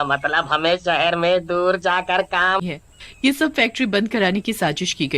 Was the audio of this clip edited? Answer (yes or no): yes